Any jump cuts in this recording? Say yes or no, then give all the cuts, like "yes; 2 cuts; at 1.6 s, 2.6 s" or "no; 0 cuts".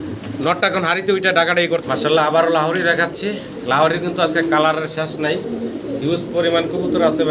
yes; 1 cut; at 1.8 s